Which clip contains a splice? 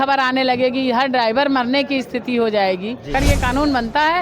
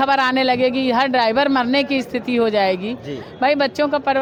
first; 1 cut; at 3.1 s

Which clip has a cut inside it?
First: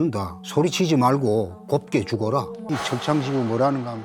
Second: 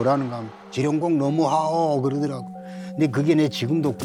first; 1 cut; at 2.6 s

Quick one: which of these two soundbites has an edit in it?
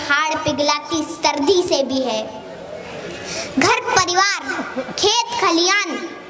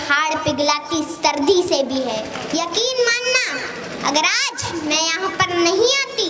second; 1 cut; at 2.4 s

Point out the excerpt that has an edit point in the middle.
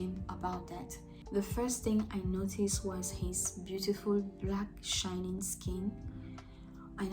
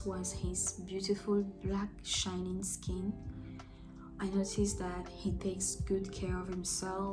first; 1 cut; at 1.1 s

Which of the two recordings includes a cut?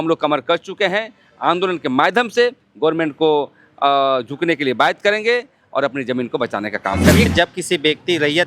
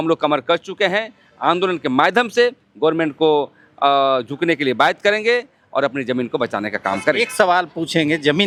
first; 1 cut; at 7.3 s

